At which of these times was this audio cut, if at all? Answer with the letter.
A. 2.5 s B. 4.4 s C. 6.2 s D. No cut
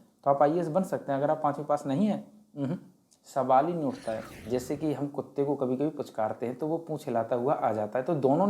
B